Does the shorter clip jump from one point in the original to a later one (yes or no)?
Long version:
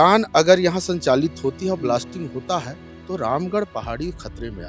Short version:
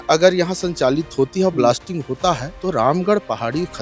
yes